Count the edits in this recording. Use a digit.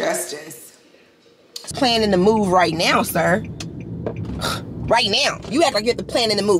1